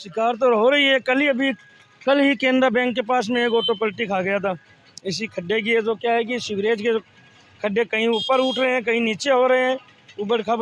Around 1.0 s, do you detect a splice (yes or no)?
no